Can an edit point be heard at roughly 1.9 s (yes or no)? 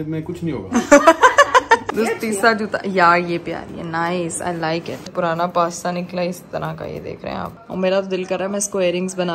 yes